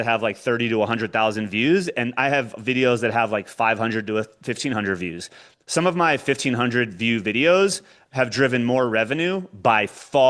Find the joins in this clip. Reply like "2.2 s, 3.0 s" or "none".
none